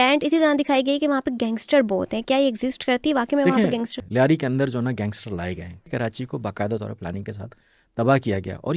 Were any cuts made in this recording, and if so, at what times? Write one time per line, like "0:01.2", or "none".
0:03.9
0:05.7